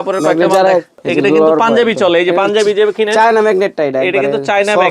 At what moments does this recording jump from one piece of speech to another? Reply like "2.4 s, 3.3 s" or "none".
1.0 s